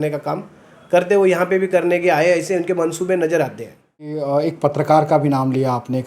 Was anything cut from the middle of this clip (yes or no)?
yes